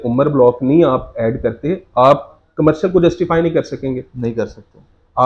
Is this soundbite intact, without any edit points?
yes; 0 cuts

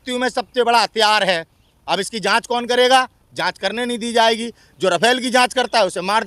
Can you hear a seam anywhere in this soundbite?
no; 0 cuts

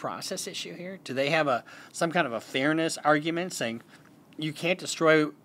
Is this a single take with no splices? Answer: yes; 0 cuts

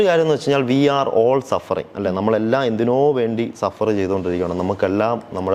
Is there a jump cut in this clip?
no; 0 cuts

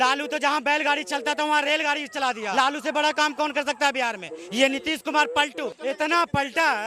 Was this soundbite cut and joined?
yes; 2 cuts; at 2.5 s, 5.7 s

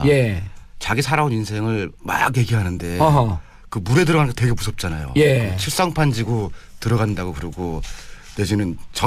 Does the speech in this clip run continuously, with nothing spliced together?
yes; 0 cuts

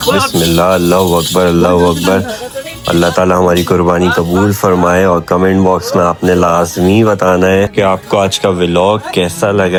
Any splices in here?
no; 0 cuts

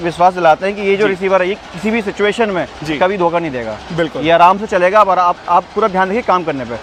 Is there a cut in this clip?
no; 0 cuts

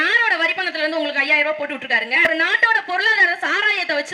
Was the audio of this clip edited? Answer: yes; 1 cut; at 2.3 s

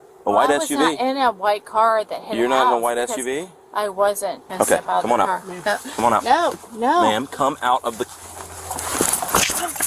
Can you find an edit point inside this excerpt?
yes; 1 cut; at 4.5 s

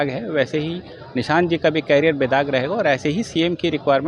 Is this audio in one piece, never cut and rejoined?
yes; 0 cuts

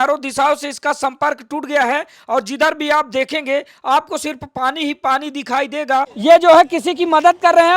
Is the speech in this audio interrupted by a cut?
yes; 1 cut; at 6.1 s

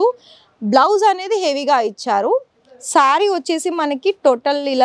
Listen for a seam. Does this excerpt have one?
no; 0 cuts

